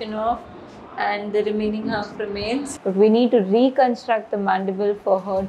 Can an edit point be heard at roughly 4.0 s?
no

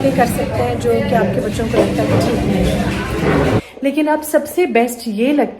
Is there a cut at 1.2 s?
no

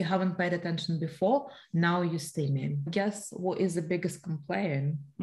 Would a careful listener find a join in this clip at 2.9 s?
yes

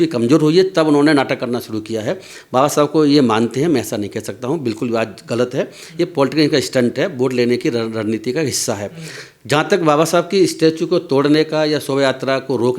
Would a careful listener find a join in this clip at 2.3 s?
no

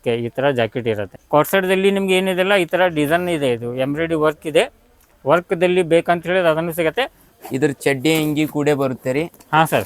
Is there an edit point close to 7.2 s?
yes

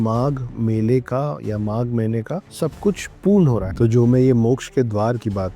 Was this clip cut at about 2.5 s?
yes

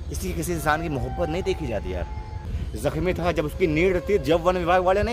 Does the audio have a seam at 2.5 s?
yes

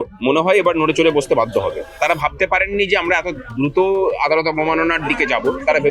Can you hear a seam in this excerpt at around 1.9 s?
yes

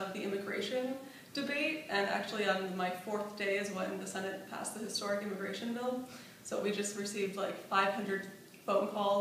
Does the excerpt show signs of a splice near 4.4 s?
yes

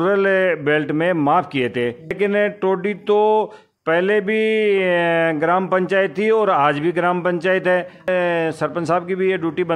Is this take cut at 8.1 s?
yes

